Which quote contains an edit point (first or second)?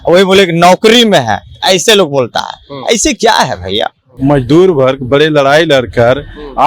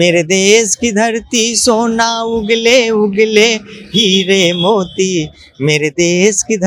first